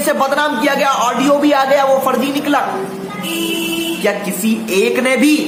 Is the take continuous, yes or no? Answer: yes